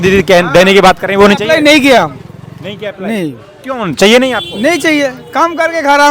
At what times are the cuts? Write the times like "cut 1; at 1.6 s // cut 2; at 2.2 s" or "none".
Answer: none